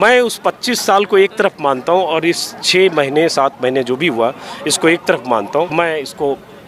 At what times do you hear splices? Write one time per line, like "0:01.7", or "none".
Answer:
0:05.7